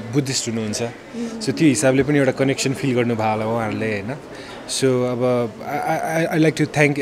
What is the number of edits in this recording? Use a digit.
0